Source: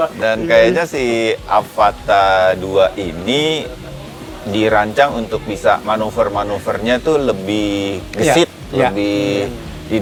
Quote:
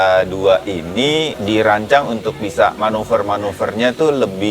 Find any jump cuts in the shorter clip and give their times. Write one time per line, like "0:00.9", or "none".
0:01.4